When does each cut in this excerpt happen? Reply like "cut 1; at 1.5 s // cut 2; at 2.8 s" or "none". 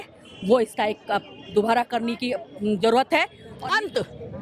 cut 1; at 3.4 s